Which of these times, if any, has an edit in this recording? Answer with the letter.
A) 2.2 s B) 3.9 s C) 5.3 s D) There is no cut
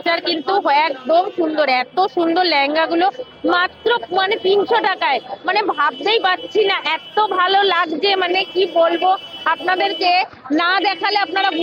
D